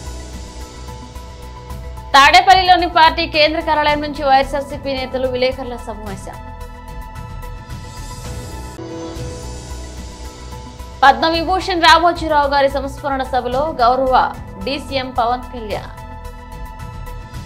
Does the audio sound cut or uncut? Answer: cut